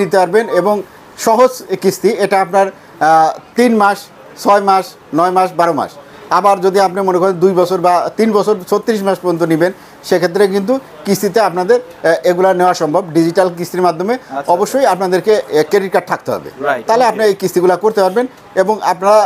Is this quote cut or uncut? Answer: uncut